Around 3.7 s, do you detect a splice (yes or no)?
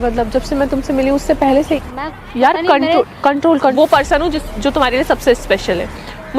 yes